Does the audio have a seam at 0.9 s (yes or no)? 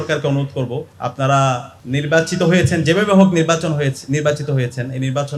yes